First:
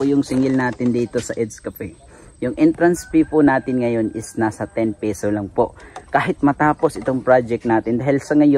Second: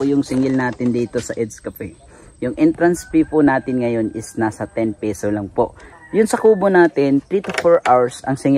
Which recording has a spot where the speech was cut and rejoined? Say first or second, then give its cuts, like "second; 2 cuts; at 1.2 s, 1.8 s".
second; 1 cut; at 6.0 s